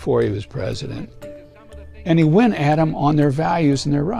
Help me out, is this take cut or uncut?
uncut